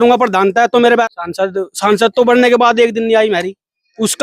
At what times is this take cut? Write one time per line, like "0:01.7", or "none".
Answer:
0:01.1

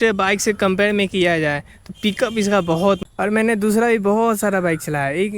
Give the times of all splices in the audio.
0:03.0

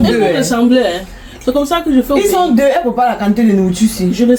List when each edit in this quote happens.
none

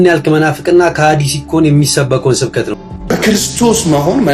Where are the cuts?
0:02.7

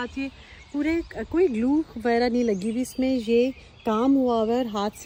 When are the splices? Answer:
none

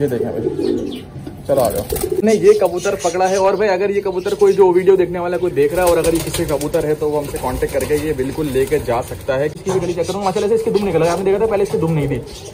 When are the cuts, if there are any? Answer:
0:02.2
0:09.6

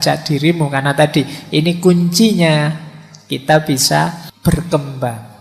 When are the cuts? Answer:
0:04.3

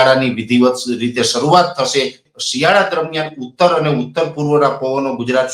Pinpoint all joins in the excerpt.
0:02.2

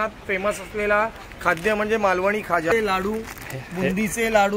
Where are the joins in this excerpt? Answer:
0:02.7

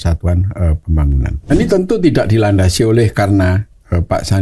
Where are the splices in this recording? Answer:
0:01.5

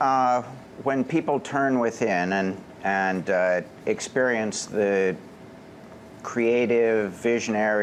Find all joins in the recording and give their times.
none

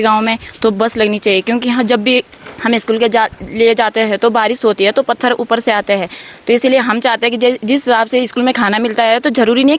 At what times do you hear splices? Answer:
none

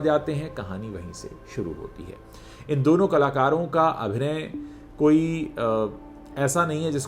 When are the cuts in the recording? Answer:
none

